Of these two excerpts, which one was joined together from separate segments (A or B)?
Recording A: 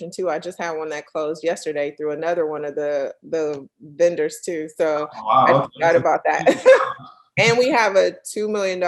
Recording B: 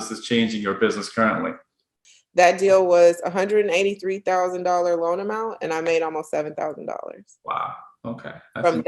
B